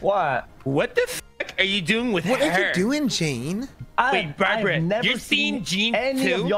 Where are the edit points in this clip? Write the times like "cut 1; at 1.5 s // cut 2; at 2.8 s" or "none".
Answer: cut 1; at 3.8 s